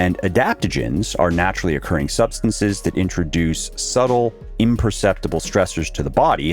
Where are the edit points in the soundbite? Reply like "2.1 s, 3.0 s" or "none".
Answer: 4.4 s